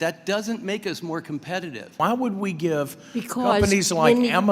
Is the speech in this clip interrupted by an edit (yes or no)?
yes